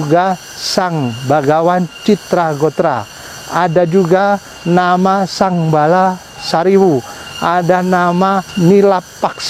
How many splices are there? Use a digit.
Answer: 1